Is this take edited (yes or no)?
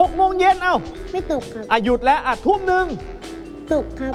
yes